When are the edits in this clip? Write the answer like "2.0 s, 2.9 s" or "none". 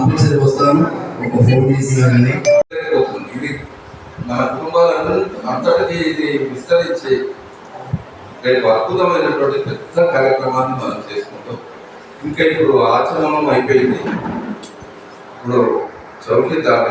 2.7 s